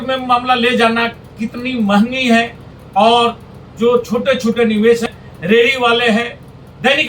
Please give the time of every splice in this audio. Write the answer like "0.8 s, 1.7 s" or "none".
5.1 s